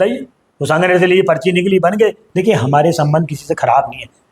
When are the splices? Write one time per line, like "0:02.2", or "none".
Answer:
0:02.2